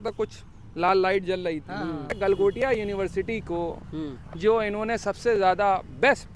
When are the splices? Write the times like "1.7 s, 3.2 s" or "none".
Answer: 2.2 s